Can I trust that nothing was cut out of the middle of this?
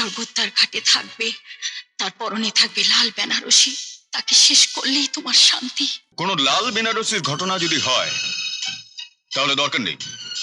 no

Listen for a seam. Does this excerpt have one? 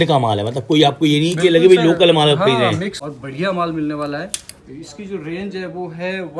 yes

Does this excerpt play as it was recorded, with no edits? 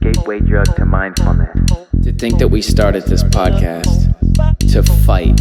no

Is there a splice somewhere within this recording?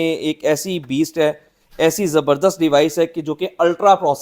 no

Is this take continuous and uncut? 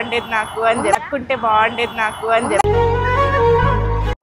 yes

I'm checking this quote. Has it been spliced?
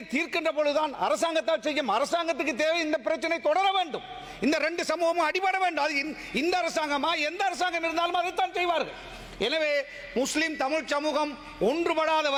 no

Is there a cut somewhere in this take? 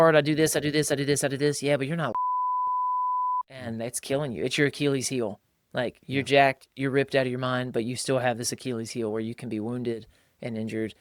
no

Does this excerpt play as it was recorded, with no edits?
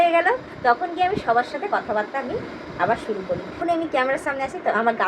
no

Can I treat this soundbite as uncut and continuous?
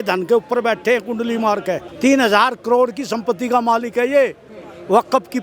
no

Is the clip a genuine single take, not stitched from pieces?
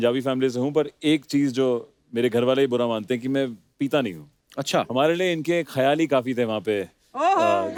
yes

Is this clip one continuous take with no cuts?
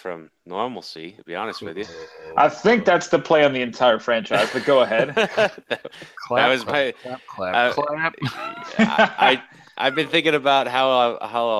yes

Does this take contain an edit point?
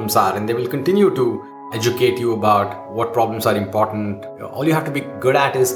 yes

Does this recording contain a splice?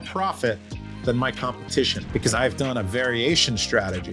yes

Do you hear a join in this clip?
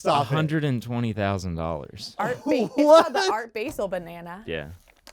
no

